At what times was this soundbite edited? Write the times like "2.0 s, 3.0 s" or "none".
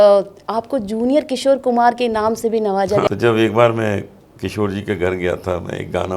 3.1 s